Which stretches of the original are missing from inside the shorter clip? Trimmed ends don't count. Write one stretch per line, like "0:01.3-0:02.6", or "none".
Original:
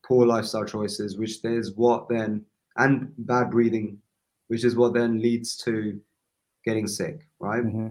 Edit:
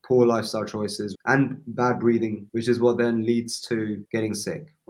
0:01.1-0:02.6
0:04.0-0:04.4
0:06.0-0:06.6

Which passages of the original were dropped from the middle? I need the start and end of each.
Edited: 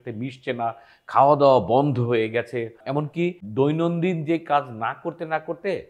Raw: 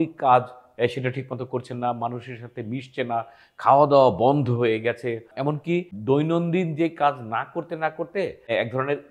none

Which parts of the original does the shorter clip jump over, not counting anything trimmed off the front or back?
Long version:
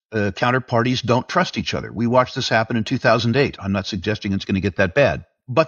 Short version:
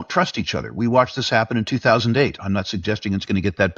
none

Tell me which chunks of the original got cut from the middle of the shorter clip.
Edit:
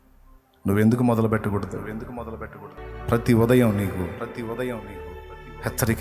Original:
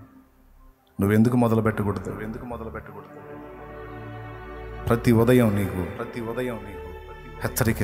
0:03.1-0:04.6

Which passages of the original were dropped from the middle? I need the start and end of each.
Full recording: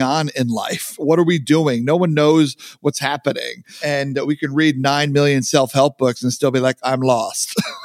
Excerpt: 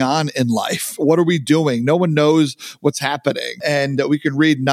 0:03.5-0:03.7

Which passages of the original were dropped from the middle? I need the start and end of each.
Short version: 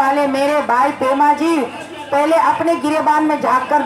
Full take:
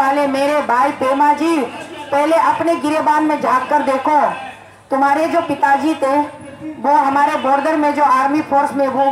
none

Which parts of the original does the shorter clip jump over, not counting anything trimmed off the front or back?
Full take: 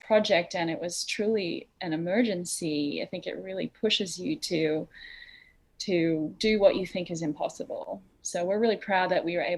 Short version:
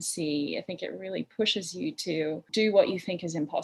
0:04.9-0:06.3

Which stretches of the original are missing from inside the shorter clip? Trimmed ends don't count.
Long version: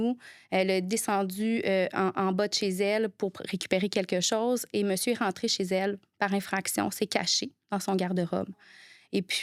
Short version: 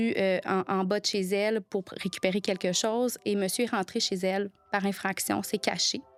none

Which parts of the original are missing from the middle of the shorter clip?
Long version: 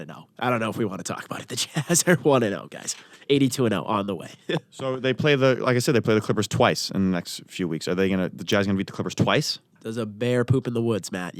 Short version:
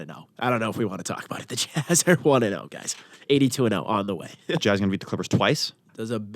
0:04.6-0:08.5

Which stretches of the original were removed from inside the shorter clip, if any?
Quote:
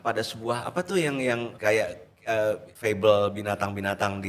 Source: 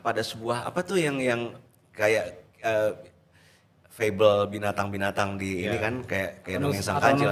0:01.5-0:01.9
0:03.1-0:03.9

